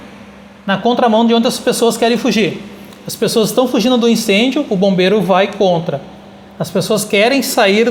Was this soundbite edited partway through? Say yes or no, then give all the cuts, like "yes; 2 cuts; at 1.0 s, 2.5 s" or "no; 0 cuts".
no; 0 cuts